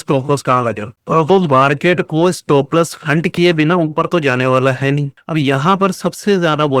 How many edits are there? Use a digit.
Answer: 1